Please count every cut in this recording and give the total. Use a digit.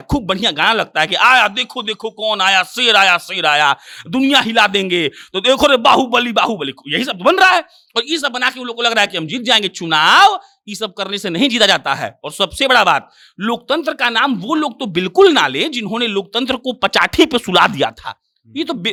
0